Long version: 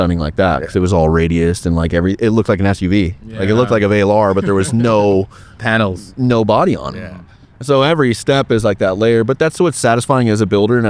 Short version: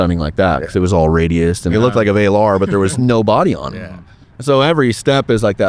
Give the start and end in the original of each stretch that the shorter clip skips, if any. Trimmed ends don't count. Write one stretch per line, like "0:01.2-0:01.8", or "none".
0:01.7-0:03.5
0:04.7-0:06.2